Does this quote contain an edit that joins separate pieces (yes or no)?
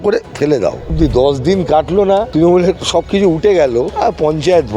yes